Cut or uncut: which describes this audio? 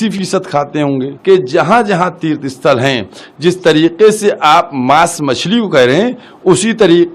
cut